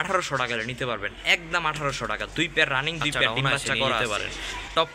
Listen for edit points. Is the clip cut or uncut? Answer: cut